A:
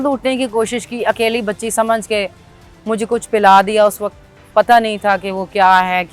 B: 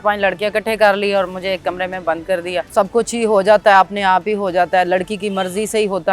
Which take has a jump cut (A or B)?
B